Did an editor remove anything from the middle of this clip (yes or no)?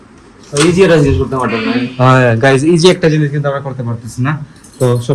no